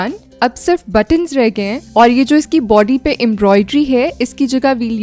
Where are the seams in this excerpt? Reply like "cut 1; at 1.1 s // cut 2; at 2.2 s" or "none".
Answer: none